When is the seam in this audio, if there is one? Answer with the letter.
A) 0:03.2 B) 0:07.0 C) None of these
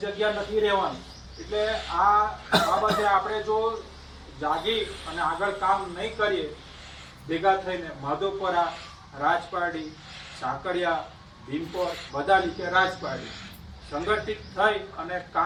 C